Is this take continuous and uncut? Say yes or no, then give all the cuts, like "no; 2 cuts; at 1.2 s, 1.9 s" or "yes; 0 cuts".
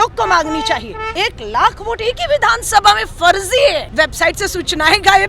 no; 2 cuts; at 1.1 s, 3.9 s